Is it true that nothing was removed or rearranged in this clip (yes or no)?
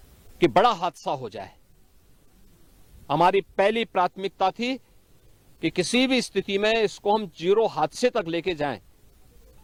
yes